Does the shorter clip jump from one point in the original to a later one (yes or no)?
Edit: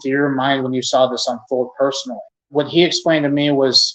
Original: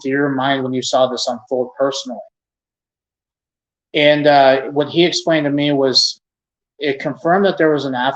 yes